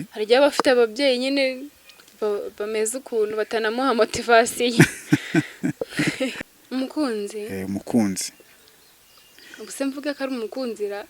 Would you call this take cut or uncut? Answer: cut